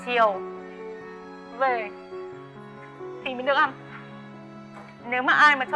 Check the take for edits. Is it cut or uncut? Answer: uncut